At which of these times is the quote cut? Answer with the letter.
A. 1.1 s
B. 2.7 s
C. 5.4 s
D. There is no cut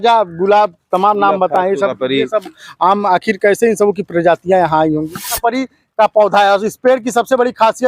C